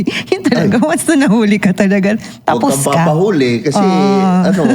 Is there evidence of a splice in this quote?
no; 0 cuts

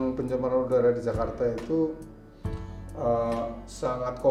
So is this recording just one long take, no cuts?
yes; 0 cuts

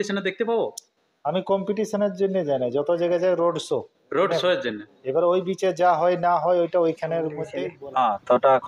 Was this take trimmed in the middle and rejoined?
yes; 1 cut; at 7.6 s

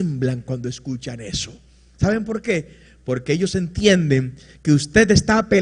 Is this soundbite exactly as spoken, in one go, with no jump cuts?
yes; 0 cuts

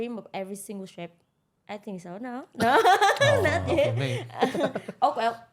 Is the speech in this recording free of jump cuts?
yes; 0 cuts

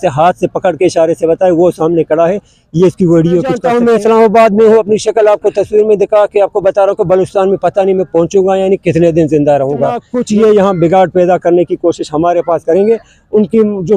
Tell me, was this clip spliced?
yes; 2 cuts; at 3.7 s, 10.1 s

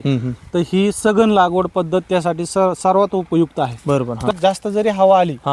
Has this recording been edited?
yes; 1 cut; at 4.3 s

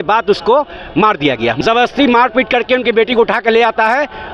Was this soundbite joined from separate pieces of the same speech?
yes; 1 cut; at 1.6 s

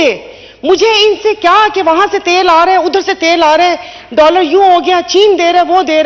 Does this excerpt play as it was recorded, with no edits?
yes; 0 cuts

